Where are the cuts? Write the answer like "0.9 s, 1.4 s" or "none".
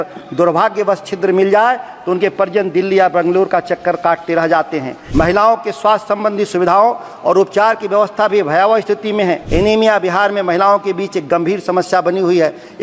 5.0 s, 9.4 s